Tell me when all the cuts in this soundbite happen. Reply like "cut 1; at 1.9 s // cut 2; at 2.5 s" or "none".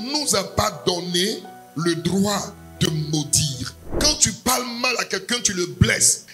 cut 1; at 3.9 s